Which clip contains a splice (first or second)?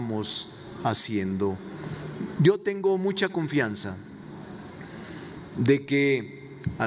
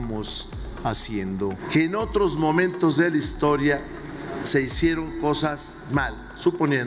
second